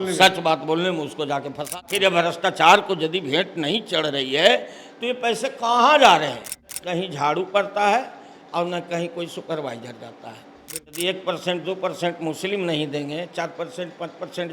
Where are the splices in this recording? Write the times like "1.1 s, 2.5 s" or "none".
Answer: 1.8 s, 6.7 s, 10.9 s